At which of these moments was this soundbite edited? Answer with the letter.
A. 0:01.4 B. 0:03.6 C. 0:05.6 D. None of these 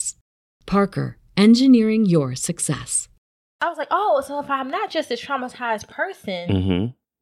B